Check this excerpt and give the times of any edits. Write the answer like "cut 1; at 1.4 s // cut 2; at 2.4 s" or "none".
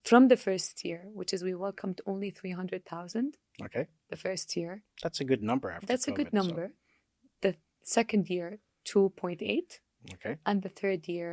none